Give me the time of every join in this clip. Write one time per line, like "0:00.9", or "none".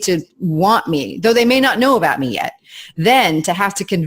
none